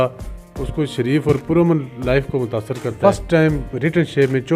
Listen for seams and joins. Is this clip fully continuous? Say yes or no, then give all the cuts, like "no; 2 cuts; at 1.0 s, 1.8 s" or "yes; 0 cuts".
no; 1 cut; at 2.9 s